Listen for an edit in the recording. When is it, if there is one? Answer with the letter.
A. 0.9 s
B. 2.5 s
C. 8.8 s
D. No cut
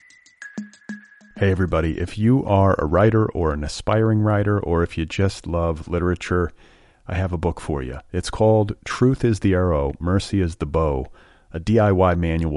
A